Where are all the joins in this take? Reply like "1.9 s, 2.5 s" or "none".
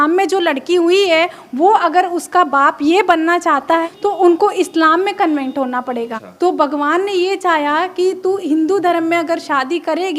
3.8 s, 6.2 s